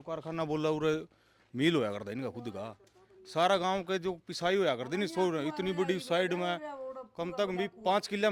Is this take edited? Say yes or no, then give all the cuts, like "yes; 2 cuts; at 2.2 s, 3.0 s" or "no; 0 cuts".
no; 0 cuts